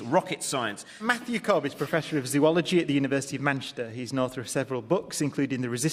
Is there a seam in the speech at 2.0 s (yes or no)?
no